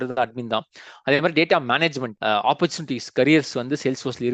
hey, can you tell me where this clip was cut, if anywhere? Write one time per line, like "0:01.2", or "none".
0:02.1